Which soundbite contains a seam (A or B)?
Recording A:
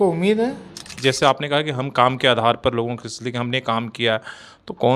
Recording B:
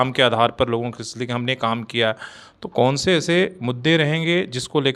A